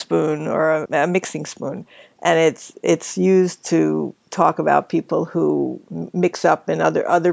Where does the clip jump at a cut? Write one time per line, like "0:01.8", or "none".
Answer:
none